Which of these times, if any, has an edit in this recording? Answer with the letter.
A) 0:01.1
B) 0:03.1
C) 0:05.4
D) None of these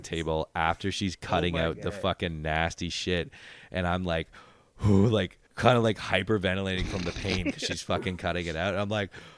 C